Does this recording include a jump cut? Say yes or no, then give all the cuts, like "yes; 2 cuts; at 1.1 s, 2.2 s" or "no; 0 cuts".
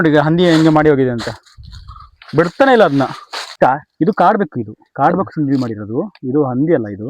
yes; 1 cut; at 3.4 s